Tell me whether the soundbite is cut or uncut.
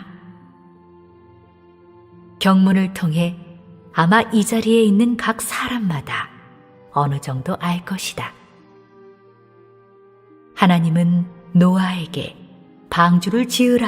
cut